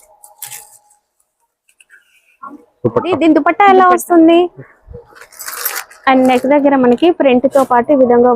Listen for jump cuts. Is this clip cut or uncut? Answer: cut